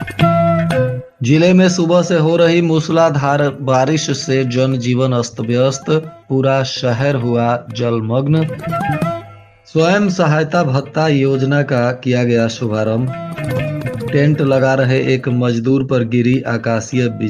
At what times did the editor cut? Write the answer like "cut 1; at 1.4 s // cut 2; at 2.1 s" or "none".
cut 1; at 1.1 s